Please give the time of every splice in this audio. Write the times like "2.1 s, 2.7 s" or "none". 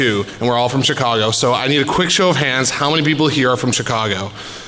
2.4 s